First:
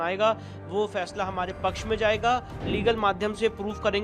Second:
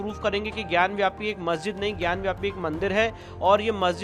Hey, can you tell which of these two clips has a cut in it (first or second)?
first